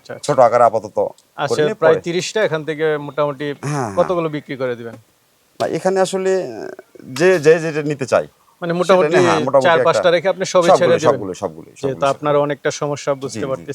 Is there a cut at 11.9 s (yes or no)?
yes